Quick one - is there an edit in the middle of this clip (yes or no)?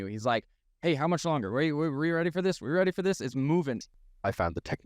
yes